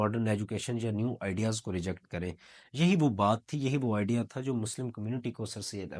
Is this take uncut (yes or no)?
yes